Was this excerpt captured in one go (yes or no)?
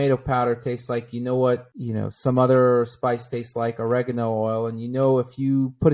yes